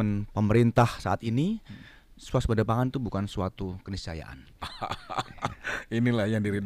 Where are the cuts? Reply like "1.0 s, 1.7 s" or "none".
4.6 s